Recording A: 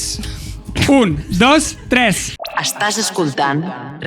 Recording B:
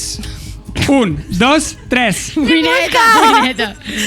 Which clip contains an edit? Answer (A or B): A